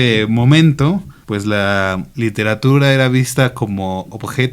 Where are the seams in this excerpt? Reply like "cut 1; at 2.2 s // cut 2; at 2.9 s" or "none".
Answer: cut 1; at 1.1 s // cut 2; at 2.1 s